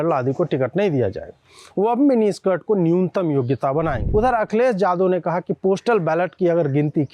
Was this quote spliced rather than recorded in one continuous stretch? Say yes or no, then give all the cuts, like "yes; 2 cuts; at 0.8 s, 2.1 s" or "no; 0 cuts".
yes; 1 cut; at 4.0 s